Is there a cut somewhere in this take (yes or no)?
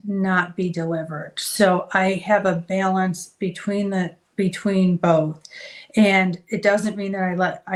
no